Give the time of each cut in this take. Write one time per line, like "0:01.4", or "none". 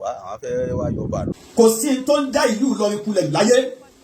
0:01.4